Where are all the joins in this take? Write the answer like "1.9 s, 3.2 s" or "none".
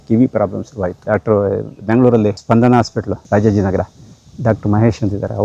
1.0 s, 2.4 s, 3.2 s